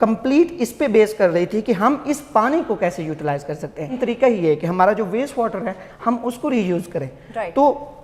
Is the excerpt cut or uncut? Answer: cut